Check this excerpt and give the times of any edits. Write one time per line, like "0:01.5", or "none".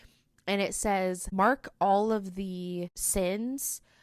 0:03.0